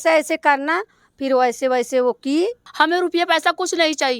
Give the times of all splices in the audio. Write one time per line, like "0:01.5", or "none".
0:02.6